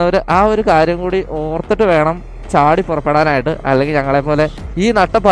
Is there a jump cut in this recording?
no; 0 cuts

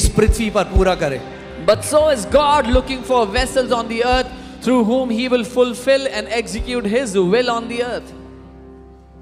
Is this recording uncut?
yes; 0 cuts

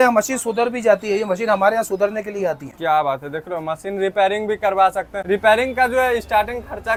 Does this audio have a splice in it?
no; 0 cuts

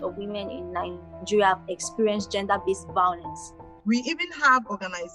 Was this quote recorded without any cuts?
no; 1 cut; at 3.6 s

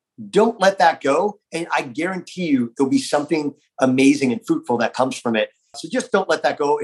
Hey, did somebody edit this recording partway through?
yes; 1 cut; at 5.7 s

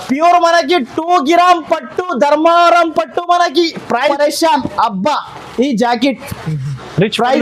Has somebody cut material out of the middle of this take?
yes; 1 cut; at 4.1 s

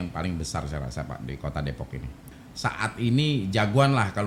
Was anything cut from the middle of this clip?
yes; 1 cut; at 2.3 s

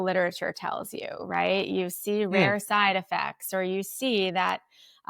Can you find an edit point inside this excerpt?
no; 0 cuts

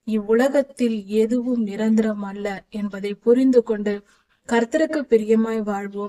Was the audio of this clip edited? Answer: no; 0 cuts

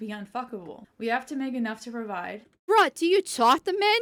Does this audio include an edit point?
no; 0 cuts

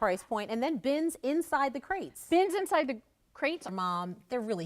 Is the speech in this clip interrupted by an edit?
yes; 1 cut; at 3.7 s

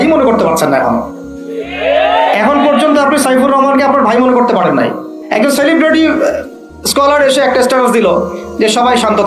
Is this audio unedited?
no; 1 cut; at 5.1 s

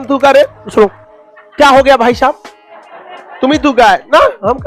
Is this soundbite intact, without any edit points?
yes; 0 cuts

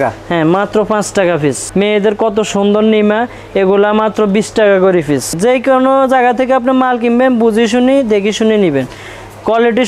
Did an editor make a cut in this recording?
yes; 2 cuts; at 1.6 s, 5.4 s

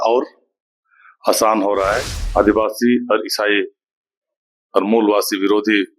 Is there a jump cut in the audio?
yes; 1 cut; at 2.1 s

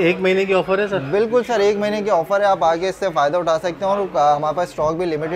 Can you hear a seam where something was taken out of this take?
no; 0 cuts

